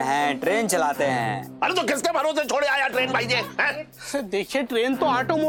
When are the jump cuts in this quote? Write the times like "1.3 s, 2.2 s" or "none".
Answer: none